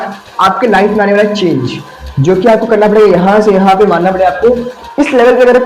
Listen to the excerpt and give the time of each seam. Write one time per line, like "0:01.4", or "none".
0:04.8